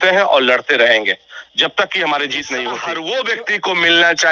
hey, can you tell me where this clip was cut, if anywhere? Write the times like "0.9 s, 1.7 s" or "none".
2.8 s